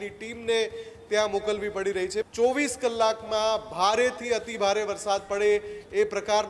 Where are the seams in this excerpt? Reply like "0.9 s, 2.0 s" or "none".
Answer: 2.3 s